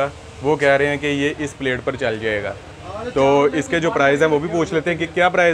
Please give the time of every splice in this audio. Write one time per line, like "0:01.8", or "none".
none

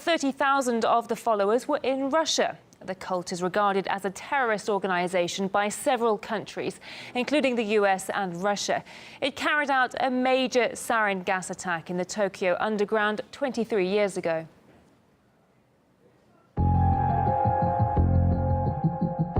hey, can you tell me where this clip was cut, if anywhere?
0:09.1

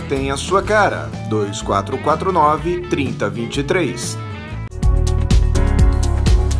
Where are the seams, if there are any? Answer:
0:04.7

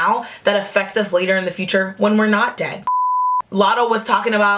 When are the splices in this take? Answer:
0:03.0

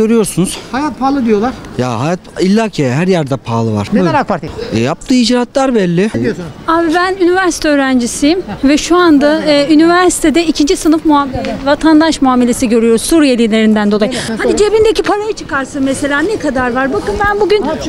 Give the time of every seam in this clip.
0:03.8
0:04.5
0:06.2
0:14.3

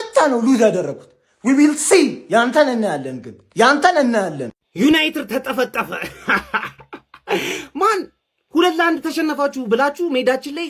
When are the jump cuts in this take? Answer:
0:04.4

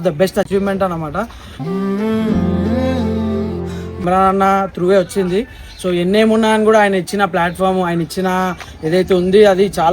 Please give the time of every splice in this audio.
0:04.0

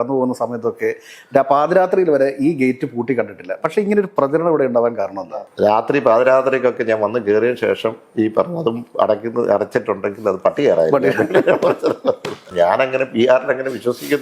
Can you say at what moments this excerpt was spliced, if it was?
0:05.3
0:12.4

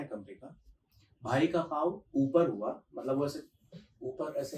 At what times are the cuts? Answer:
none

